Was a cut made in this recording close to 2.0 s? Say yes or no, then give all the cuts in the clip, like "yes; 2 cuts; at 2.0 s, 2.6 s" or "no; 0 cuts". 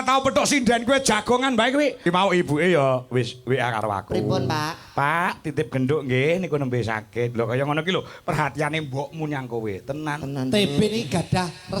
yes; 1 cut; at 2.0 s